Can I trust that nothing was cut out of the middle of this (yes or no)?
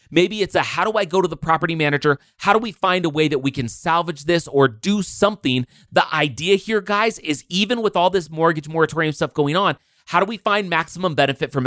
yes